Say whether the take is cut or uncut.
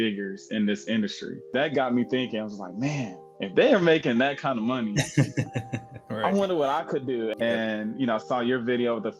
cut